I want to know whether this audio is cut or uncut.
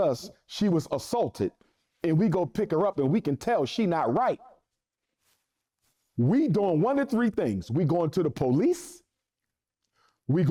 uncut